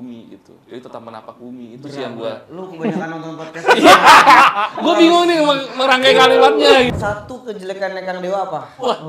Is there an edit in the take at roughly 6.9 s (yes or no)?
yes